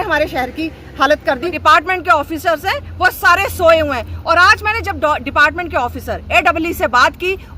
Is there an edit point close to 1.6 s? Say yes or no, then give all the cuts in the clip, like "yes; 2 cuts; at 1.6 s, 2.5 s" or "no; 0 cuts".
yes; 1 cut; at 1.6 s